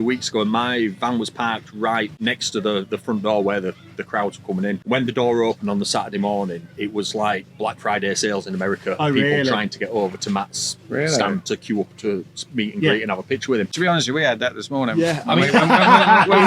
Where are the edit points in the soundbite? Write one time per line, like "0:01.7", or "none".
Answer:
0:02.1
0:04.8
0:13.7